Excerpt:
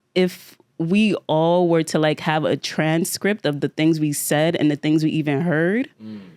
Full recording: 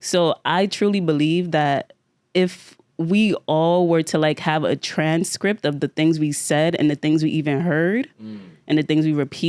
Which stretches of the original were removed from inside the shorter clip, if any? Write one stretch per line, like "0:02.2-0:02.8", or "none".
none